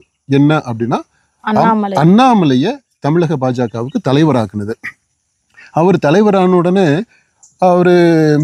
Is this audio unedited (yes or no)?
yes